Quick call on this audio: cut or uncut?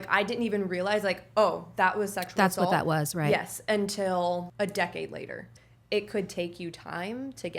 cut